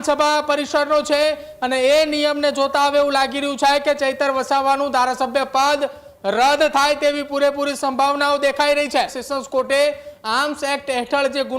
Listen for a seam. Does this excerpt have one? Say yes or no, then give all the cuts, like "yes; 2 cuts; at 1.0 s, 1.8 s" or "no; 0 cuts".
yes; 1 cut; at 9.2 s